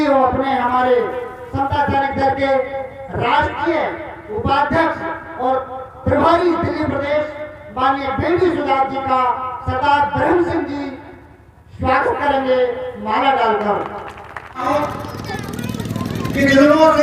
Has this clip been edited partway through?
yes; 1 cut; at 14.7 s

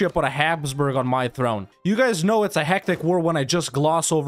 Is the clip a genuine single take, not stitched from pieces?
no; 1 cut; at 1.7 s

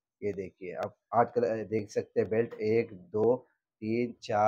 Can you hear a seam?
no; 0 cuts

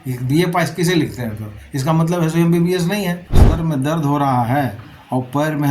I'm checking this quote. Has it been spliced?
yes; 1 cut; at 3.4 s

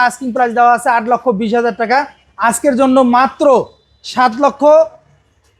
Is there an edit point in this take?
no; 0 cuts

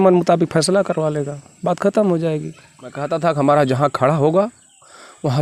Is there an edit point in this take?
yes; 1 cut; at 3.0 s

